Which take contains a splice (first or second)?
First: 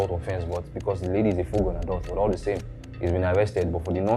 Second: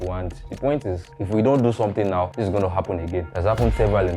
second